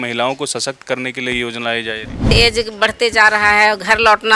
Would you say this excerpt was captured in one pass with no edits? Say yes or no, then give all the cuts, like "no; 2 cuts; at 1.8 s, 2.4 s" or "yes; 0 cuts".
no; 1 cut; at 2.3 s